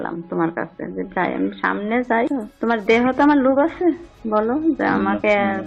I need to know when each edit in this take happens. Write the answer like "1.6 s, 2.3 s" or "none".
none